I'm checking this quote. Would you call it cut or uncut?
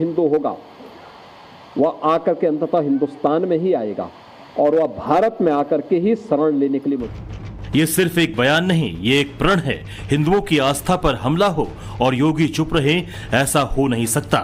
uncut